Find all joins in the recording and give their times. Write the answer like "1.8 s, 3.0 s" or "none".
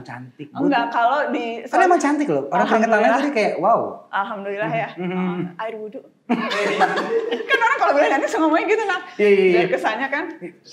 none